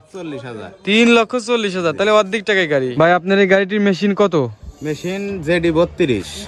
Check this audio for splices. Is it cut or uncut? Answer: cut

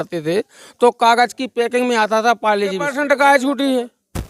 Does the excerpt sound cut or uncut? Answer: cut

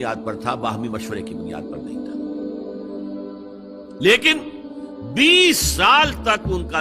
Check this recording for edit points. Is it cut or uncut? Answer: uncut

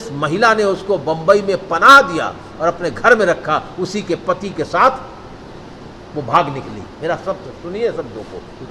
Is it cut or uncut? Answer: uncut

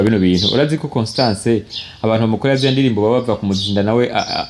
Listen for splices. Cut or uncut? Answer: uncut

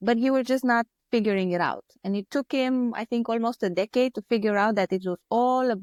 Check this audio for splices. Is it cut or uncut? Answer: uncut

